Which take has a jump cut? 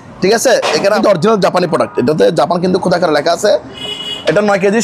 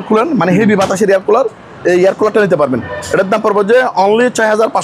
first; 2 cuts; at 1.0 s, 3.8 s

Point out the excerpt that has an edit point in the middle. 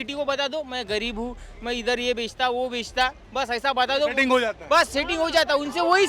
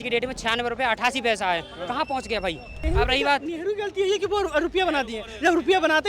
second; 1 cut; at 2.8 s

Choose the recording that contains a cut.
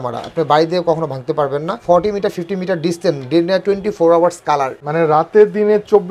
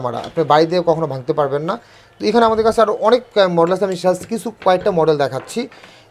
first; 2 cuts; at 1.8 s, 4.8 s

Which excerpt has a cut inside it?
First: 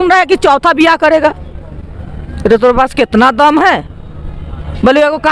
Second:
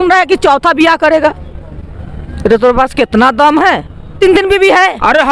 second; 1 cut; at 4.1 s

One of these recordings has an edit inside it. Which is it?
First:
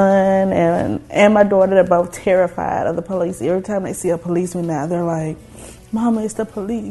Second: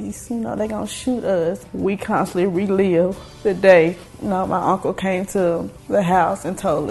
second; 4 cuts; at 1.7 s, 3.3 s, 4.1 s, 5.7 s

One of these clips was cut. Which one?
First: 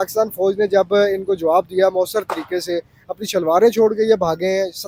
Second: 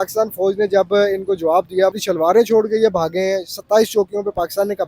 second; 1 cut; at 1.9 s

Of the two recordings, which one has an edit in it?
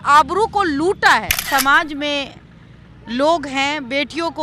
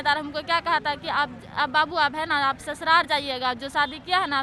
first; 1 cut; at 1.4 s

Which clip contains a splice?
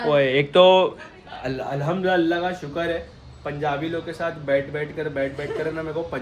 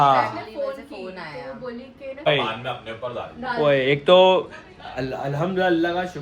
second; 1 cut; at 2.3 s

